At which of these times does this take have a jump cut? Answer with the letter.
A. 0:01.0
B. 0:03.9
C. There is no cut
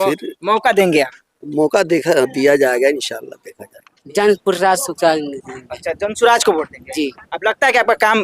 B